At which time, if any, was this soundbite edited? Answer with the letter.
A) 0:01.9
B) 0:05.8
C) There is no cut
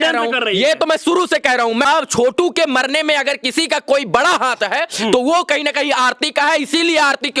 A